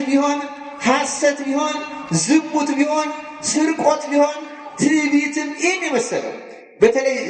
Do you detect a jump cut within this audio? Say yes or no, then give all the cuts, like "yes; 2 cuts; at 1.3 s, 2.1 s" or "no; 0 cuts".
no; 0 cuts